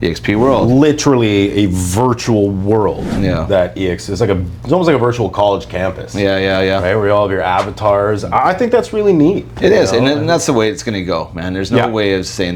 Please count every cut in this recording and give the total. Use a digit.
0